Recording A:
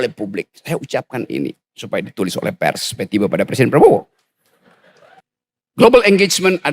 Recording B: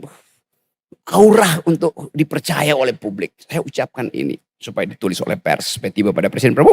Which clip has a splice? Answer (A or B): A